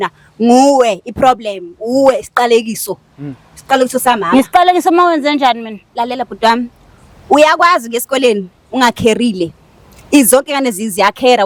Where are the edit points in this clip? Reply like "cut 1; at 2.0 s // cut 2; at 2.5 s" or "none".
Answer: none